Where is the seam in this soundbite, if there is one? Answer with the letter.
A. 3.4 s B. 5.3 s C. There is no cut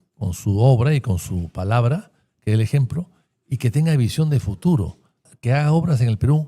B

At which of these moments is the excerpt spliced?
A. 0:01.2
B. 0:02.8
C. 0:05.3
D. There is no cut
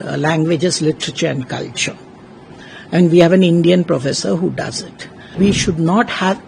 C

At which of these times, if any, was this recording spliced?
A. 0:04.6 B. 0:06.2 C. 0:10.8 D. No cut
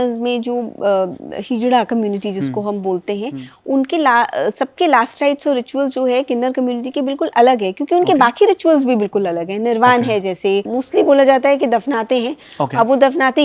C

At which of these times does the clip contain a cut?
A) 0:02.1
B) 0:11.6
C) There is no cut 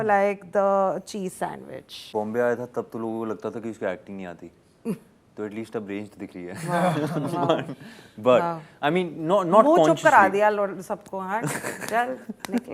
A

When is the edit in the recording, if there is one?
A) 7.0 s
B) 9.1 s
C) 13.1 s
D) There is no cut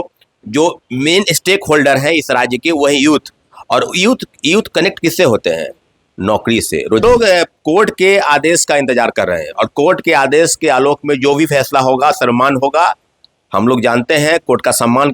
A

